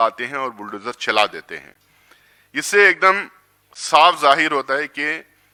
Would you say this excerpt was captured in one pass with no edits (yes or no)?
yes